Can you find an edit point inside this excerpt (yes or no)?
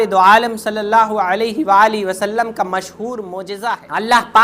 yes